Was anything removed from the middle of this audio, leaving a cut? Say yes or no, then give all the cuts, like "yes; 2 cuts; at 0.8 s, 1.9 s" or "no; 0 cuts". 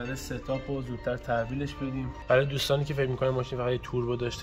no; 0 cuts